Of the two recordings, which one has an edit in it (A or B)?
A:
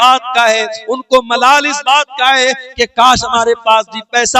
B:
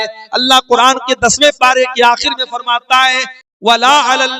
B